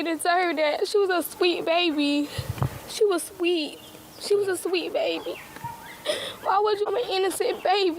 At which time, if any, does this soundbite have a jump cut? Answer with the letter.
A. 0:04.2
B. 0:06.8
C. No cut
B